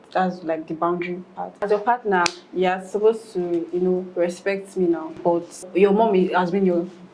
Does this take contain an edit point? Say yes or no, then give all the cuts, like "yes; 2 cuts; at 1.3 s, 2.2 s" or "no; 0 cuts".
yes; 2 cuts; at 1.7 s, 5.6 s